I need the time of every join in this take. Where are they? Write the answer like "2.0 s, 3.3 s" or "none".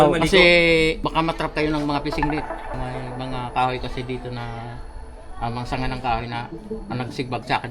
1.0 s, 2.8 s